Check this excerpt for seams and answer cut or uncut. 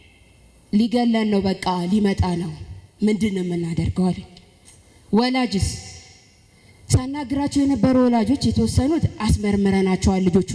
uncut